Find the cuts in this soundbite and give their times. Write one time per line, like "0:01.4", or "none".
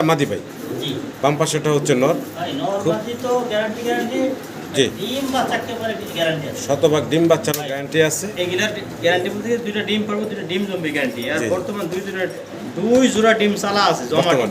none

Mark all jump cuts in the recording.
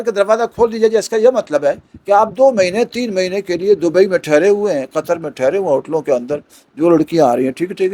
none

